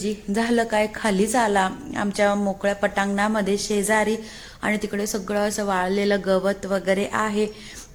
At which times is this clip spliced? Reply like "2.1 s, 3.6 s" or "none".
none